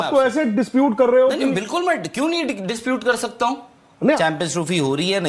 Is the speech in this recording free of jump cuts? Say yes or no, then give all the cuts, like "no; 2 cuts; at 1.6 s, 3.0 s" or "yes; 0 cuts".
no; 1 cut; at 4.2 s